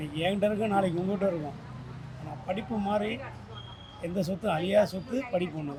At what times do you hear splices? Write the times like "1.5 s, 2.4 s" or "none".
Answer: none